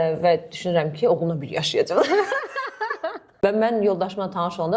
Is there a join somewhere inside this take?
yes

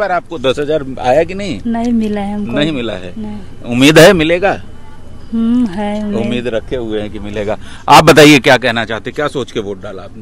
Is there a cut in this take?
no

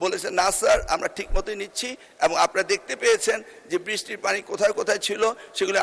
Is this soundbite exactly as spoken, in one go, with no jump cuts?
yes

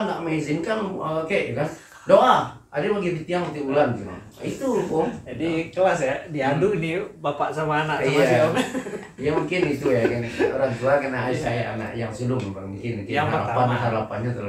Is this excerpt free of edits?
yes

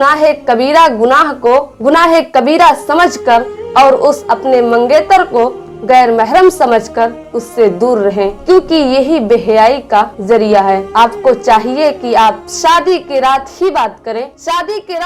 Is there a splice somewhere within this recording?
no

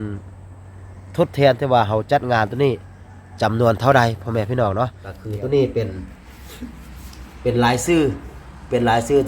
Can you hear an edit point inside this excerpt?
yes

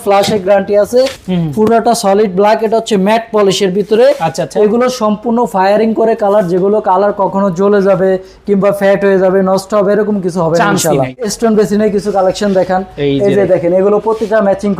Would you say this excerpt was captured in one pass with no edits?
no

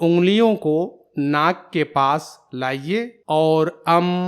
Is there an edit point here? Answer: yes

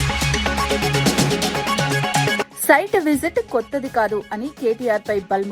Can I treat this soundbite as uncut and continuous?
no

